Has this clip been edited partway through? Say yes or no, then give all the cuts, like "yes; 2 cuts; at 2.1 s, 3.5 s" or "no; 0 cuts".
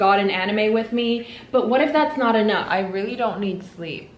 yes; 1 cut; at 2.6 s